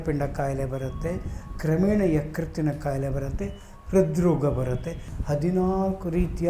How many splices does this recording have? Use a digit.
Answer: 1